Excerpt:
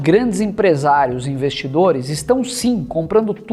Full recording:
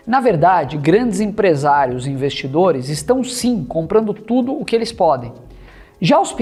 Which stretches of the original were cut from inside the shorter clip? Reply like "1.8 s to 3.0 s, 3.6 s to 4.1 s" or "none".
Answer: none